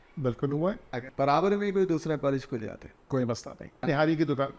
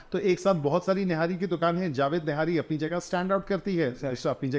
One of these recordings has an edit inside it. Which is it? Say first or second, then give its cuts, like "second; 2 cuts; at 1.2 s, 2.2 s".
first; 2 cuts; at 0.9 s, 3.8 s